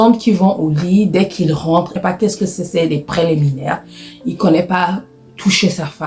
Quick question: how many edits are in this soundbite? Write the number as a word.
one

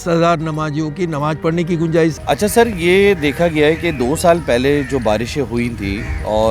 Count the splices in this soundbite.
one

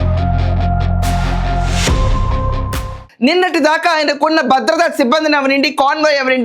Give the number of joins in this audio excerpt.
one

